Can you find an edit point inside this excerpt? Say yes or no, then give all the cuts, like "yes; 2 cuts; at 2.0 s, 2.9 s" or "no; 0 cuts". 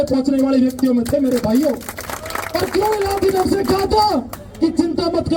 no; 0 cuts